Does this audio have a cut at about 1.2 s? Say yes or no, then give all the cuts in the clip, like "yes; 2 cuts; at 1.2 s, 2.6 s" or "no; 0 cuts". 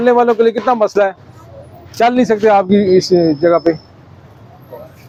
no; 0 cuts